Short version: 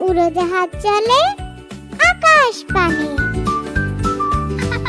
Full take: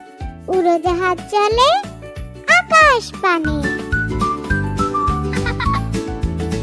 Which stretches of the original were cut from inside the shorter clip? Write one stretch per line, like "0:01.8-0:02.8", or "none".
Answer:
0:03.5-0:03.8